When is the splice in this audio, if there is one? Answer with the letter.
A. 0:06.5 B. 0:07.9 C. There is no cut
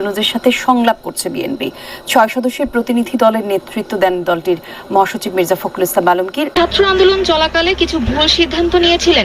A